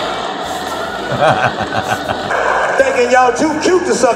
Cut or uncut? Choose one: cut